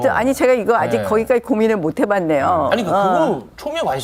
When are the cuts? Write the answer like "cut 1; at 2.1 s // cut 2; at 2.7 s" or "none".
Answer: none